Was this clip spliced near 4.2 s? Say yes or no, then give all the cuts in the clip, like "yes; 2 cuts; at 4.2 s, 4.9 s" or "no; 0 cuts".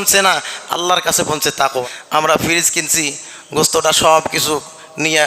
no; 1 cut; at 1.8 s